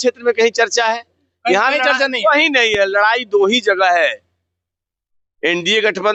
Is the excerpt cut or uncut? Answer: uncut